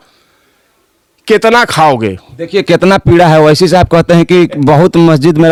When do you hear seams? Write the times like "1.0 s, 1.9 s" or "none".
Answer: none

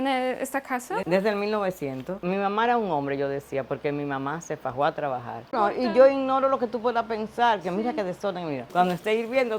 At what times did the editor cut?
2.2 s, 5.5 s, 8.7 s

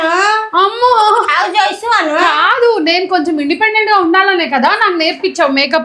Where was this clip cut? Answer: 1.1 s

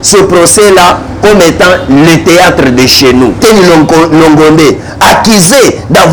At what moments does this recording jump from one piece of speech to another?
3.4 s

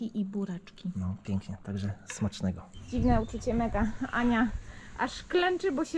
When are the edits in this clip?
2.7 s

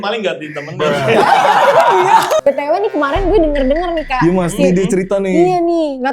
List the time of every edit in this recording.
2.4 s

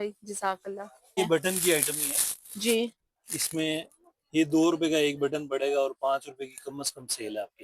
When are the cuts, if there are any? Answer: 1.2 s

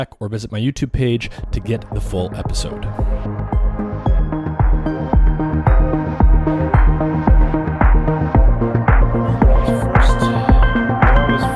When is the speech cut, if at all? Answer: 2.5 s

